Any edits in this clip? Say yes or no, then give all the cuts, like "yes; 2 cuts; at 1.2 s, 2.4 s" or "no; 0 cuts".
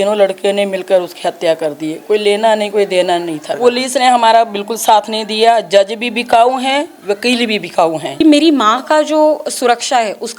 yes; 2 cuts; at 3.5 s, 8.2 s